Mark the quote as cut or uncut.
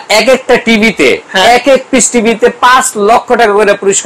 uncut